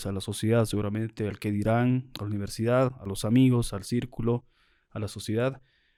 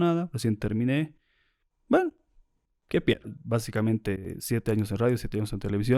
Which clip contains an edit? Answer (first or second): second